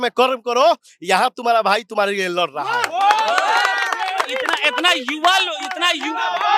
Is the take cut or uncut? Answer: uncut